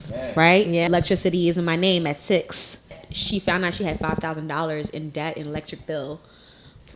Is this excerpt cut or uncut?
cut